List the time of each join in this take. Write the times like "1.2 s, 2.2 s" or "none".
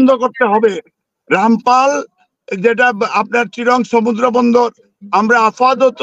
none